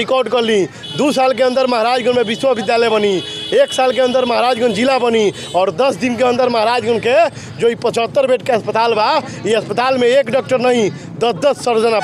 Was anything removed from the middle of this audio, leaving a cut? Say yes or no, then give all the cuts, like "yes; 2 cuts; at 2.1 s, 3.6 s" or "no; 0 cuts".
no; 0 cuts